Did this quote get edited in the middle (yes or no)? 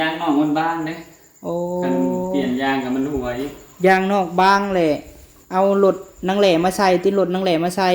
no